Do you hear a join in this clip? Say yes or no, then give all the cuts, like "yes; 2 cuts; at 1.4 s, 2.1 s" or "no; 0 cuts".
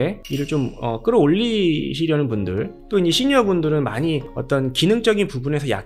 no; 0 cuts